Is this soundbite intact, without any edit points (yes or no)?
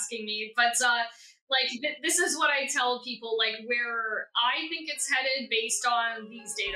yes